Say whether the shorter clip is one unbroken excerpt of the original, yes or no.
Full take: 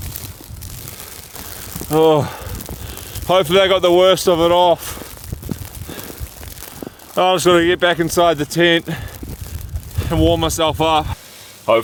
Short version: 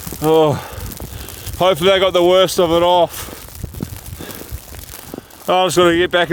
yes